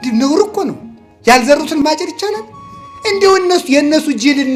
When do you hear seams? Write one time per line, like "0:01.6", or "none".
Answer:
0:01.8